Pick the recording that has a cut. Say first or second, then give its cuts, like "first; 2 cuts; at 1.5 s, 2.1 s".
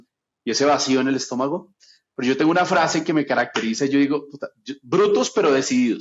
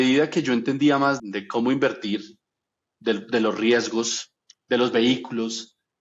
second; 1 cut; at 1.2 s